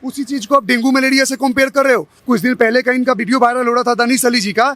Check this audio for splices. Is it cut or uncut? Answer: cut